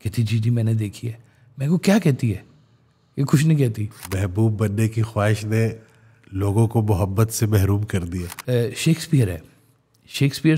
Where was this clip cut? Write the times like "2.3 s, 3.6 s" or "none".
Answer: 4.0 s, 8.3 s